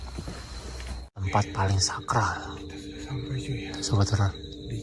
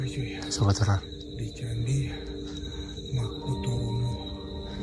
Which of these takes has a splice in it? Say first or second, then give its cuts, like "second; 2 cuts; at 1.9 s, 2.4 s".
first; 1 cut; at 1.0 s